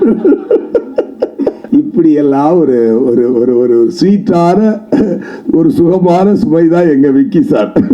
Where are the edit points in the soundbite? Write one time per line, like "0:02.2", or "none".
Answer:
0:01.6